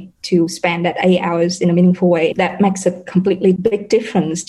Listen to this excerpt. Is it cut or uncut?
cut